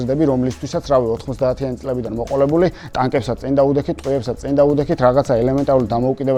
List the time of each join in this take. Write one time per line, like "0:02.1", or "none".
none